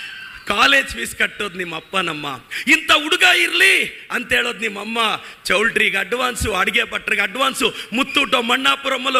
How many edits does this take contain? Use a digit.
0